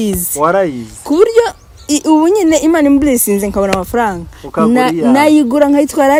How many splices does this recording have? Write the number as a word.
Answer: zero